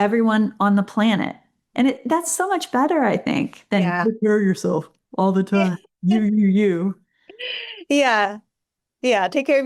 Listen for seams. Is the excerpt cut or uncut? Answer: uncut